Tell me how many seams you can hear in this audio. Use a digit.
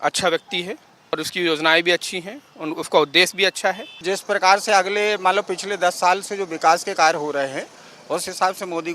2